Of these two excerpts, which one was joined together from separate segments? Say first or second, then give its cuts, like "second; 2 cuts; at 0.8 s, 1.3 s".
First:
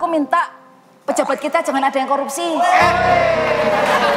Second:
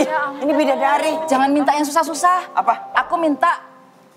second; 1 cut; at 1.2 s